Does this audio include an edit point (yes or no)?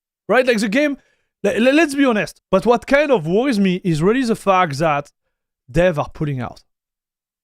yes